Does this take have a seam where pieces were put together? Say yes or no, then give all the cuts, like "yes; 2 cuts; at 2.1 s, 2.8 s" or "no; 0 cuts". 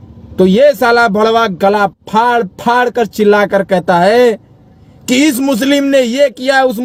no; 0 cuts